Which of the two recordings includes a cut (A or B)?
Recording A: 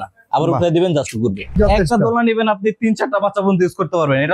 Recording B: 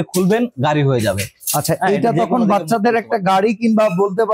A